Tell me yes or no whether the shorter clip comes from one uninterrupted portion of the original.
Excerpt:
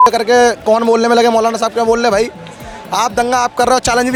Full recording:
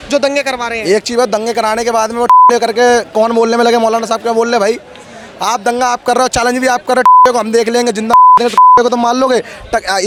yes